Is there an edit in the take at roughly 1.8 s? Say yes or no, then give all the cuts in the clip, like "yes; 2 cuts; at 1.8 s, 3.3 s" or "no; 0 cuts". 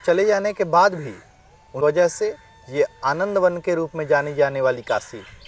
yes; 1 cut; at 1.8 s